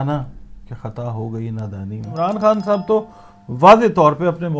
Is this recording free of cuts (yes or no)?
no